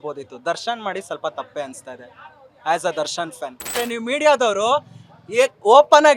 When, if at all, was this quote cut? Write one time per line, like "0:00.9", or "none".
0:03.8

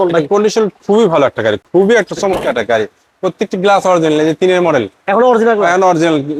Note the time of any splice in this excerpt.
none

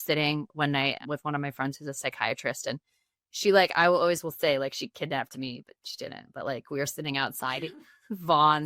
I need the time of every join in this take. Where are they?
0:01.0

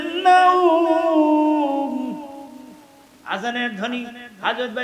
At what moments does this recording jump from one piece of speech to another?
none

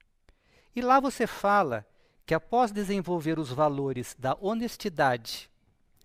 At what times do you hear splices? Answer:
0:04.8

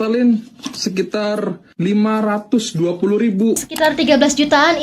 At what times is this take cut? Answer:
0:03.7

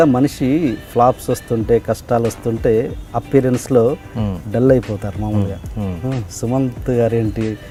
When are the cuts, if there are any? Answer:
none

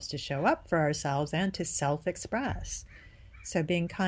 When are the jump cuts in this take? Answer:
none

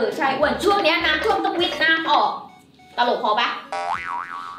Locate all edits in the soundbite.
none

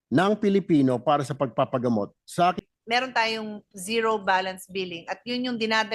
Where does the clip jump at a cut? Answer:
0:02.6

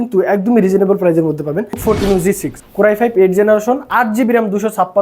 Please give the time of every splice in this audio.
0:01.8
0:02.6

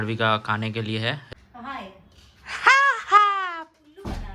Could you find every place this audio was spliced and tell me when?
0:01.3

